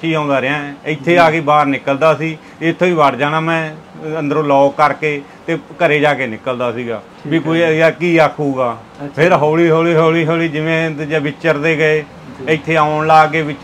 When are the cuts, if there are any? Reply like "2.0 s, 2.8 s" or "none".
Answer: none